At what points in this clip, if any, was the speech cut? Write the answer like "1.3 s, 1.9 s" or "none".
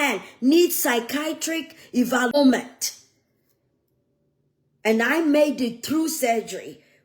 2.3 s